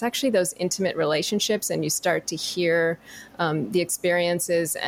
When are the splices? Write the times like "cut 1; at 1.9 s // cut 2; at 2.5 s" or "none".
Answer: none